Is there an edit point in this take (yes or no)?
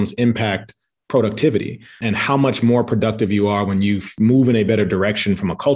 yes